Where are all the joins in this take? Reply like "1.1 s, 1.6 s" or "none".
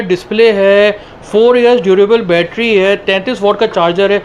none